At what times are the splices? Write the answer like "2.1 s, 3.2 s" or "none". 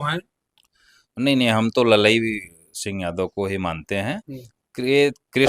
none